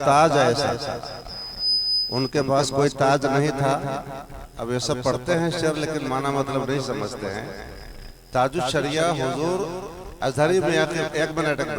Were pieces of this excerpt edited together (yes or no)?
no